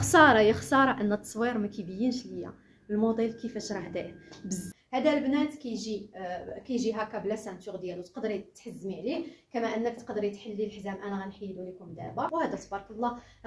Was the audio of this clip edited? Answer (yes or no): yes